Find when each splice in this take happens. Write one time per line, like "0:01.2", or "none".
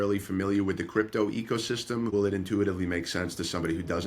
0:02.1